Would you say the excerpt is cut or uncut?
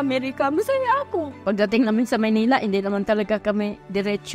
cut